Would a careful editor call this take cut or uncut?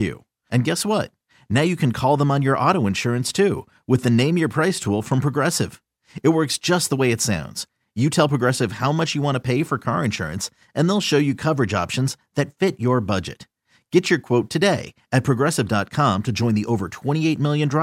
uncut